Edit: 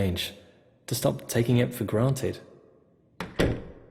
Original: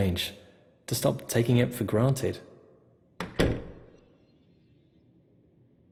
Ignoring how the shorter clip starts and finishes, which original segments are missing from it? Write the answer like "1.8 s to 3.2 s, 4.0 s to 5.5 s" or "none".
none